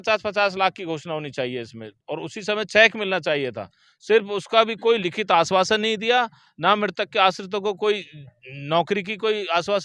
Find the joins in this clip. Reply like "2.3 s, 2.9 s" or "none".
none